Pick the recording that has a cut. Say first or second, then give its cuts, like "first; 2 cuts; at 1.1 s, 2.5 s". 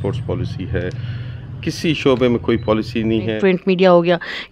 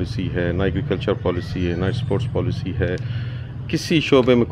first; 1 cut; at 3.4 s